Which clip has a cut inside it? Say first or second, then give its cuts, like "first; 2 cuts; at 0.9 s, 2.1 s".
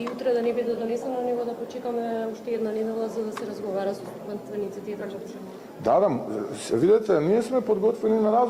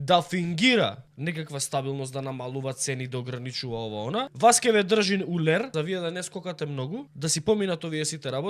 second; 4 cuts; at 1.1 s, 4.3 s, 5.7 s, 7.1 s